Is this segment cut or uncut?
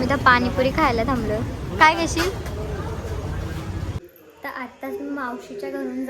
cut